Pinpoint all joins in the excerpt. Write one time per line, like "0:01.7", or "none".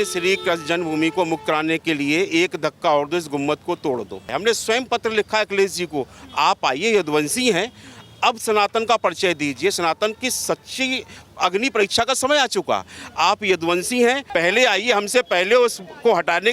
0:04.3
0:14.2